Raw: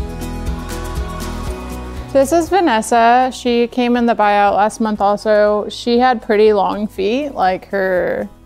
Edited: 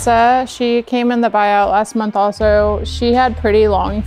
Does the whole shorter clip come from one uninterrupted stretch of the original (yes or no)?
yes